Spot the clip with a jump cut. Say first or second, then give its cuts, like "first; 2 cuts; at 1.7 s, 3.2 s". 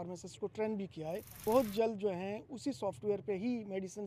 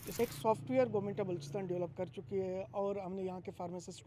first; 1 cut; at 1.4 s